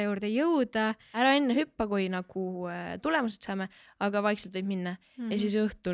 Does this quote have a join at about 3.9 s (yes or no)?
no